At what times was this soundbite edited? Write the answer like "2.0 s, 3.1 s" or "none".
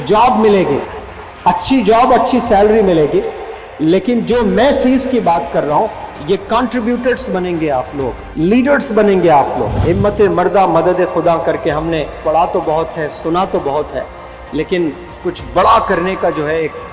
8.2 s, 9.7 s